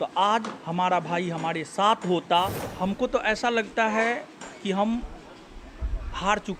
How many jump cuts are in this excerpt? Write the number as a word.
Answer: one